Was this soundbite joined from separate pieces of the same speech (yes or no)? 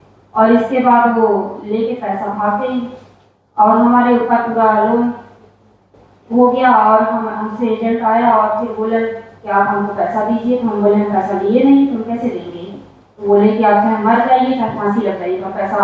no